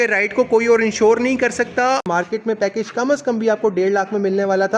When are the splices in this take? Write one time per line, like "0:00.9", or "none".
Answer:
0:02.1